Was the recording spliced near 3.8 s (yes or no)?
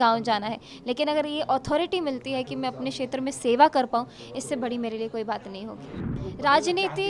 no